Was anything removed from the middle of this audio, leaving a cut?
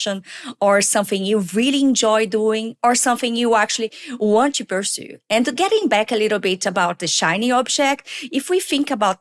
no; 0 cuts

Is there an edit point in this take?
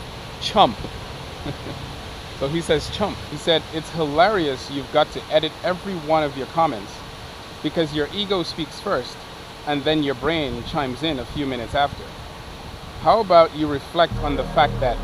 yes; 1 cut; at 3.3 s

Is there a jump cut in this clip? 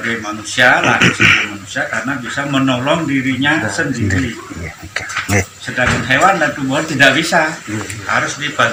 no; 0 cuts

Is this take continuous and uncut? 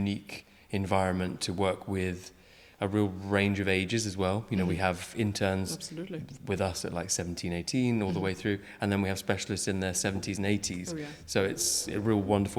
yes; 0 cuts

